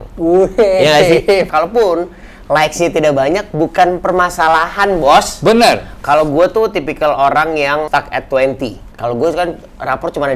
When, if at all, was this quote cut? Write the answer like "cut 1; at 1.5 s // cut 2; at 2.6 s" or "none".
cut 1; at 1.5 s // cut 2; at 6.0 s // cut 3; at 7.9 s // cut 4; at 8.9 s